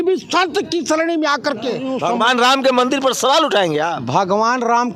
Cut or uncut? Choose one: cut